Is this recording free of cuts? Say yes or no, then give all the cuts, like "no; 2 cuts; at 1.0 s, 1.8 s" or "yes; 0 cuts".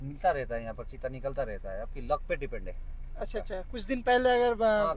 yes; 0 cuts